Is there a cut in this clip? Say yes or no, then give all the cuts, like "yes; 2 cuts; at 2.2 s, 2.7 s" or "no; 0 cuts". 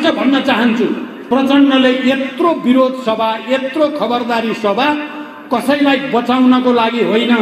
yes; 1 cut; at 1.1 s